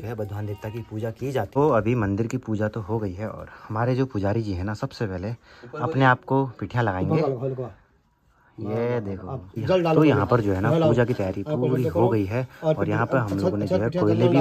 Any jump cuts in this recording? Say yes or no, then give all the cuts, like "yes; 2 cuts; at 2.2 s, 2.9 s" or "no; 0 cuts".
no; 0 cuts